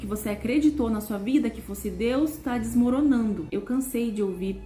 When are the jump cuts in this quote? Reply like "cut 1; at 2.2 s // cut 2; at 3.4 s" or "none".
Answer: cut 1; at 3.4 s